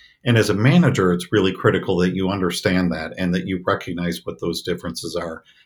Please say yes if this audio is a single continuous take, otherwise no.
yes